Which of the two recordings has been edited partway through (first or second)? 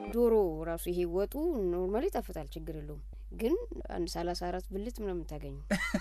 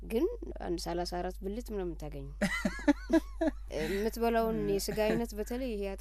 second